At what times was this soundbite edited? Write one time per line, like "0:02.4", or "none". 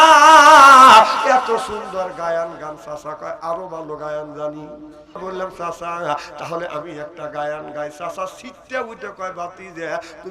0:05.2